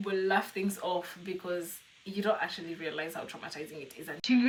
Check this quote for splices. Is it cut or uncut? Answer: uncut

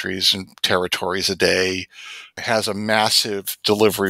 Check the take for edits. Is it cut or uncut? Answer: uncut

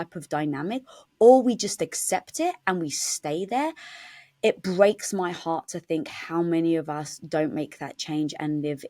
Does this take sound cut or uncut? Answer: uncut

